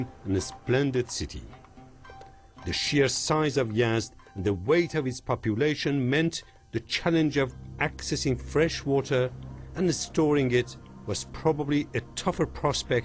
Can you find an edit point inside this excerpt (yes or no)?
no